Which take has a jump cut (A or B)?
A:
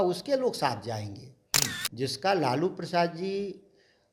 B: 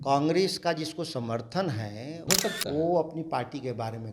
B